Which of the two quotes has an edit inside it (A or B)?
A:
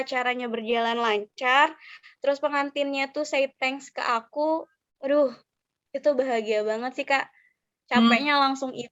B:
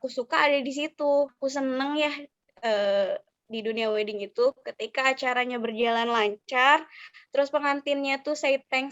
B